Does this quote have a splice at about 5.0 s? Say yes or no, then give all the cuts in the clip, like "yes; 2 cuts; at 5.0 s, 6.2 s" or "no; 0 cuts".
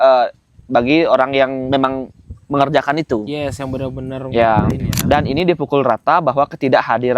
yes; 1 cut; at 5.0 s